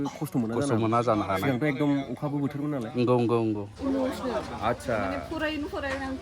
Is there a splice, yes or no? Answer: yes